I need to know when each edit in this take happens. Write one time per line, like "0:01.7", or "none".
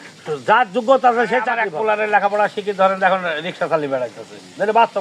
0:01.6